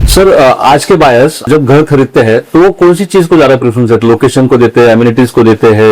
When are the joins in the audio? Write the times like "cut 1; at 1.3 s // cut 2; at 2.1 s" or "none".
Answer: cut 1; at 1.5 s